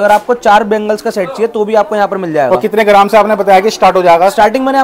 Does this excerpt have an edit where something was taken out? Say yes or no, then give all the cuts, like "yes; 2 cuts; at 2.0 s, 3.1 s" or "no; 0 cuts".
no; 0 cuts